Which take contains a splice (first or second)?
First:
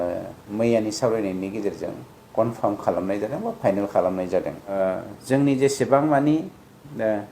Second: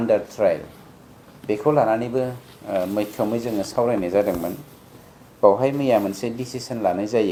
first